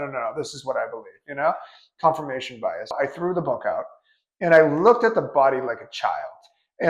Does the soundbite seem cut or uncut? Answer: cut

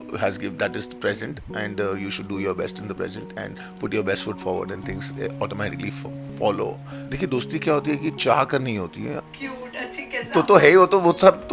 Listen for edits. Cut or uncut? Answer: cut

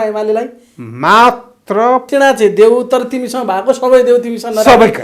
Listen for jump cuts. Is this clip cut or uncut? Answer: cut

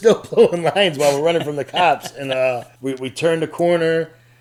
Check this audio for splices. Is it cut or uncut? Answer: uncut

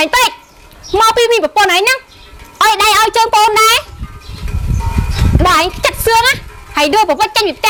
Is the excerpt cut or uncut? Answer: uncut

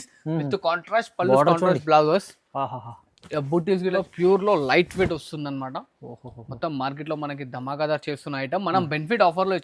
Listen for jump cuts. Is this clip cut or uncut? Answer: cut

